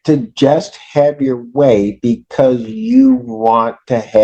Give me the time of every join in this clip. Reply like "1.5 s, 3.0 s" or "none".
none